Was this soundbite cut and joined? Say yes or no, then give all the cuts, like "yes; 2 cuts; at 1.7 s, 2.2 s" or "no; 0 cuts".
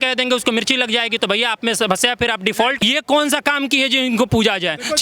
yes; 1 cut; at 2.8 s